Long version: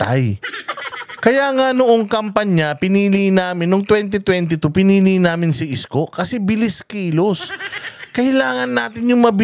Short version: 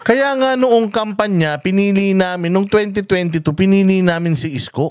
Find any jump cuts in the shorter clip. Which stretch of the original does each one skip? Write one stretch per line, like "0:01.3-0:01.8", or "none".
none